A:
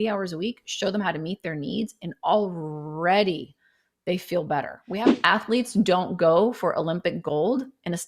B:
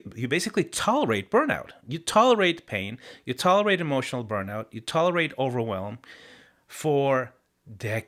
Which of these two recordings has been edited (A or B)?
A